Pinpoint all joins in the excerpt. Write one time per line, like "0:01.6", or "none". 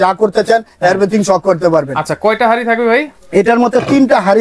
none